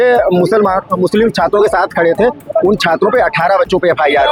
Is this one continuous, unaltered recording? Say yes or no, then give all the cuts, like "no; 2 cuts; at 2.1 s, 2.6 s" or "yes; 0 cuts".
yes; 0 cuts